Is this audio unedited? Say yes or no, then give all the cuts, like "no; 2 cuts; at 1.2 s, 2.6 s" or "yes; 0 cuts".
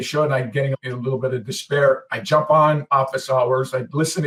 yes; 0 cuts